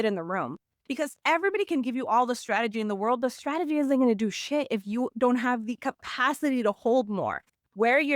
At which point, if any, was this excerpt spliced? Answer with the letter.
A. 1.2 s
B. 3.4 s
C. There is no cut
A